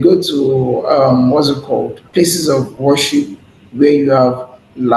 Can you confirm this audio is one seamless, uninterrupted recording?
no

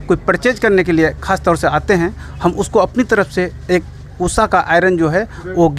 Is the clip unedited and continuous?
yes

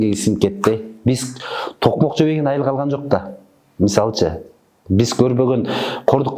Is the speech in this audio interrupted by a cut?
no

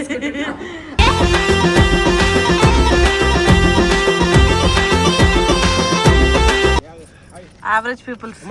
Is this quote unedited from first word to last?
no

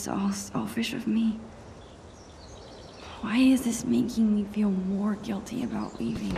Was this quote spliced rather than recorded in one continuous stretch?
yes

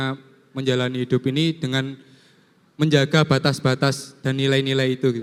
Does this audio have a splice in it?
no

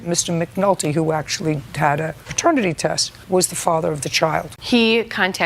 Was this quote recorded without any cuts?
no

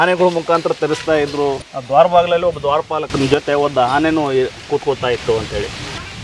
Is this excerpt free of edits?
no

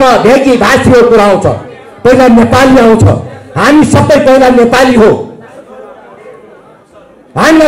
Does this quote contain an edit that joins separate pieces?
no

